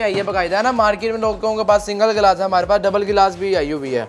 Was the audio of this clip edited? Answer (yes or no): no